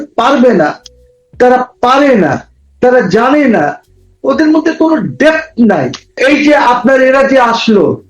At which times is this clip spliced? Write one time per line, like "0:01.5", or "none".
0:06.2

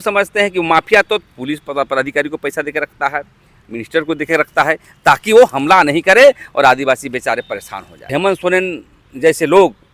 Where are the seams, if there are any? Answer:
0:08.1

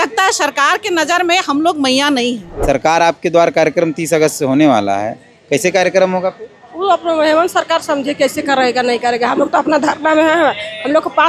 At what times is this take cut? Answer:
0:02.5

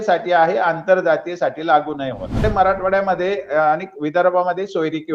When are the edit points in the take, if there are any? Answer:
0:02.4

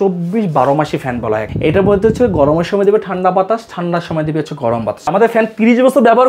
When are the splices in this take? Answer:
0:01.5
0:05.1

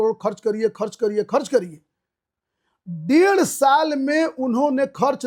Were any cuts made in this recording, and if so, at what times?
none

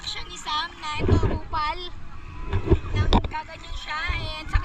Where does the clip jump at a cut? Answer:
none

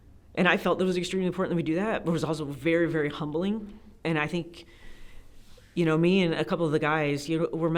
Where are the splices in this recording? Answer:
0:03.8

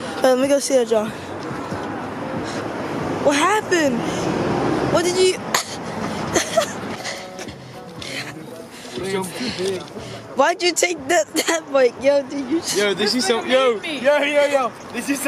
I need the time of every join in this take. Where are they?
0:06.9

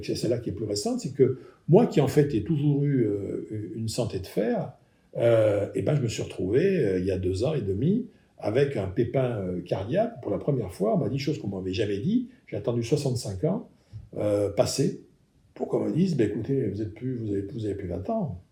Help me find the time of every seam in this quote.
none

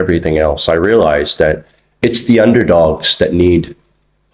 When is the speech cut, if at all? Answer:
none

